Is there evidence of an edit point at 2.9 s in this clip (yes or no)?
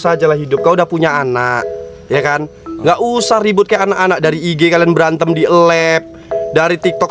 no